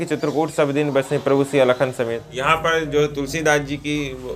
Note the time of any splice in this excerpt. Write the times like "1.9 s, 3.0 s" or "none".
2.3 s